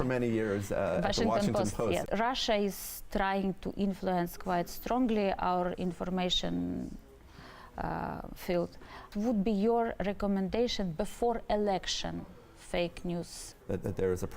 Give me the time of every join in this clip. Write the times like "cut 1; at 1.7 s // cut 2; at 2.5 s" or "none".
cut 1; at 2.0 s // cut 2; at 9.1 s // cut 3; at 13.4 s

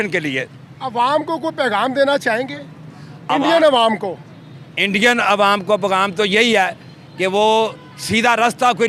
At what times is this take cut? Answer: none

